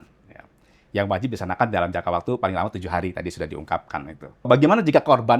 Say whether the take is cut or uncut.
cut